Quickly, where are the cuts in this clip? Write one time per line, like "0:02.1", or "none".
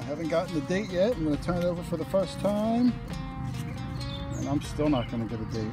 none